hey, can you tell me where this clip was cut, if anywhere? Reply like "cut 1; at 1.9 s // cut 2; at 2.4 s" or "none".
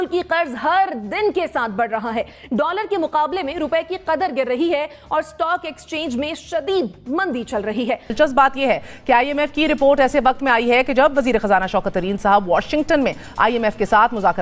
cut 1; at 8.1 s

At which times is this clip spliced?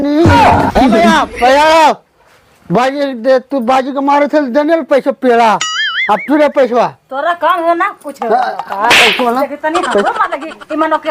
none

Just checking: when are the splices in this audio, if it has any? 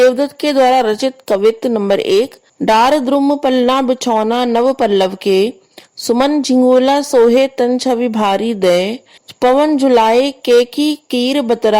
cut 1; at 2.4 s

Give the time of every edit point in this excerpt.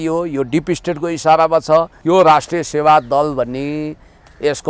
cut 1; at 1.9 s

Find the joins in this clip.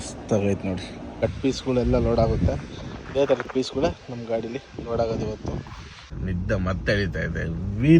cut 1; at 1.2 s // cut 2; at 6.1 s

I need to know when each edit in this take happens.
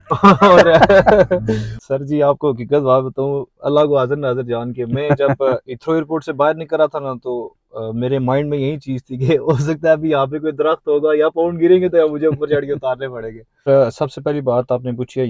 cut 1; at 1.7 s // cut 2; at 13.6 s

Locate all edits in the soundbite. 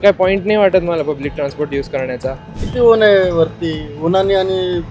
cut 1; at 2.6 s

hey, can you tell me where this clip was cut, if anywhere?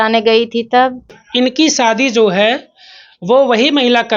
cut 1; at 1.2 s

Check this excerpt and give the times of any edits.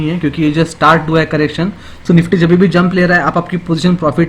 cut 1; at 2.0 s

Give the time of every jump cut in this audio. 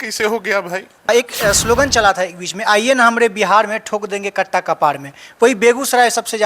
cut 1; at 1.1 s

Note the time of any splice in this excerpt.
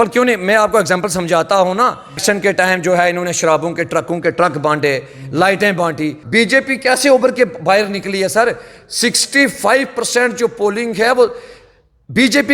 cut 1; at 2.2 s // cut 2; at 6.2 s

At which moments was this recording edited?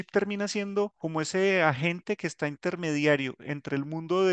cut 1; at 1.0 s

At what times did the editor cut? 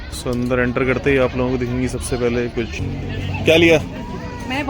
cut 1; at 2.9 s

